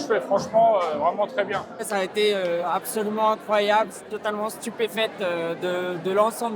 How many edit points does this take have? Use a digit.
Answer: 1